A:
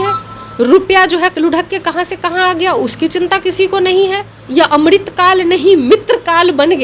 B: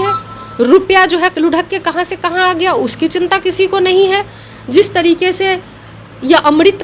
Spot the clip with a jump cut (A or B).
A